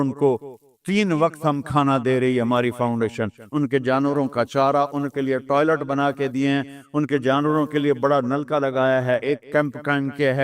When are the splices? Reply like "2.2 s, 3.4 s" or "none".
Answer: 3.4 s, 9.2 s